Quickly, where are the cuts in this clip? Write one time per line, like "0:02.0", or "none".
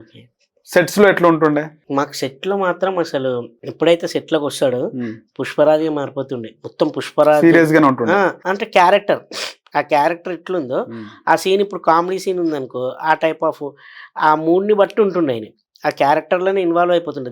0:03.6
0:08.5